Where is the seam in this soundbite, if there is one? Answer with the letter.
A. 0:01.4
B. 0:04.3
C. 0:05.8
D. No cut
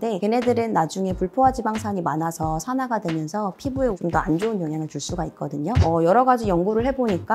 C